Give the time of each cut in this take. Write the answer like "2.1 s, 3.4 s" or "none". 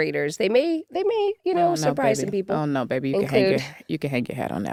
none